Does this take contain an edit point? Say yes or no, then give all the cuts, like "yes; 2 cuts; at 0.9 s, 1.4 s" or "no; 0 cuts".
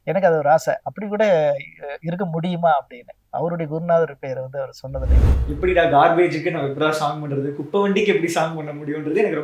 yes; 1 cut; at 5.3 s